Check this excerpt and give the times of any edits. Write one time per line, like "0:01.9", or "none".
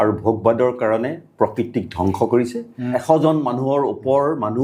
0:02.9